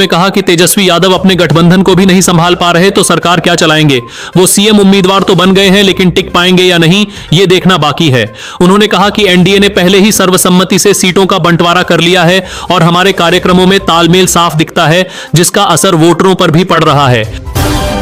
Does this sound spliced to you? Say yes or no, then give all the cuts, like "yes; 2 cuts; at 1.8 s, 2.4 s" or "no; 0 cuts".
no; 0 cuts